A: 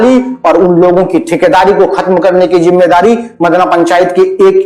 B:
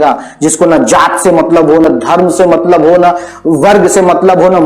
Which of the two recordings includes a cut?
B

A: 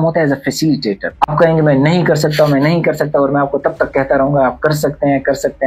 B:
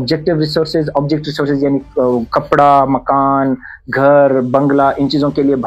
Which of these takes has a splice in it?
A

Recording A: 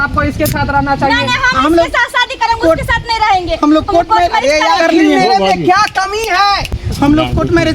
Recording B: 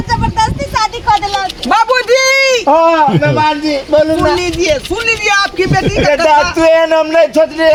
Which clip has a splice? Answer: A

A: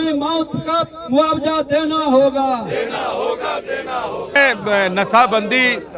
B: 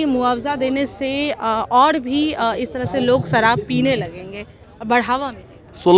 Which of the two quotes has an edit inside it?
A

